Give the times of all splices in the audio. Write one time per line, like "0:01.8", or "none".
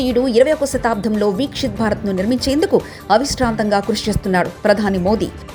none

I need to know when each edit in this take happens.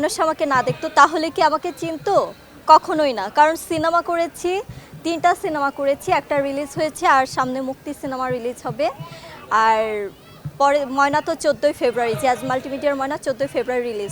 none

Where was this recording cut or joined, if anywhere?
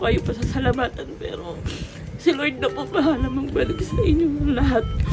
none

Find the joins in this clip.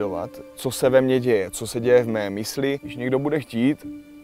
0:02.9

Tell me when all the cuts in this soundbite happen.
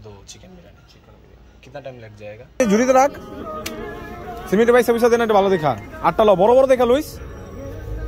0:02.6

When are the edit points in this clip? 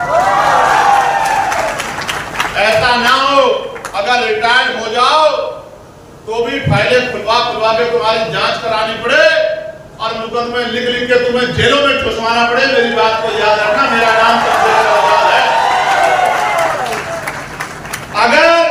none

